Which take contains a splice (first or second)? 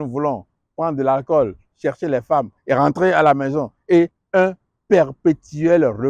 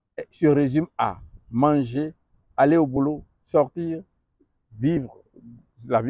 first